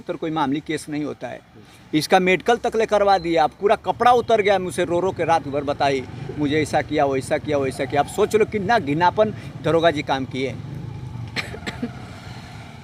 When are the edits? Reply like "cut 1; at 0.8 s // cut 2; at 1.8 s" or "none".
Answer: none

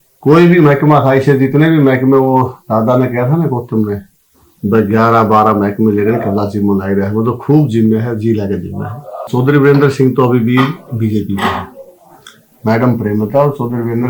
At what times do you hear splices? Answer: cut 1; at 9.3 s

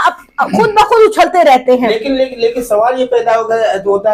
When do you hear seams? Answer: none

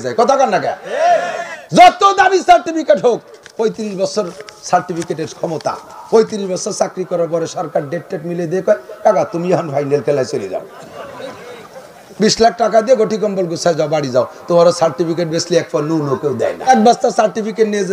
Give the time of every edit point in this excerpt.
cut 1; at 16.7 s

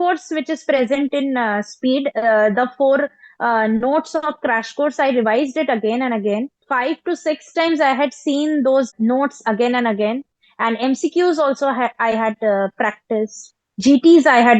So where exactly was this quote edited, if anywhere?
cut 1; at 6.6 s // cut 2; at 8.9 s

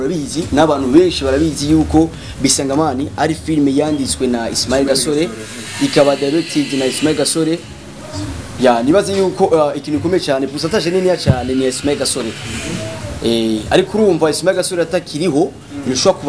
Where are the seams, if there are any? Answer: none

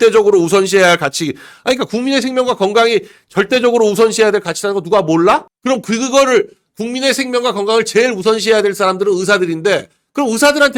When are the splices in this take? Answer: none

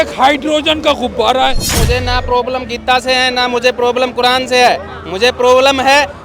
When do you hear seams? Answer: cut 1; at 1.8 s

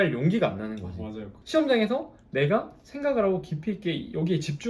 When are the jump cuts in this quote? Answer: cut 1; at 1.3 s

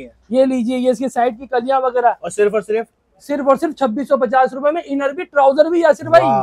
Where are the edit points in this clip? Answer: none

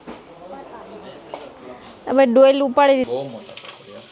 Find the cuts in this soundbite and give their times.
cut 1; at 3.1 s

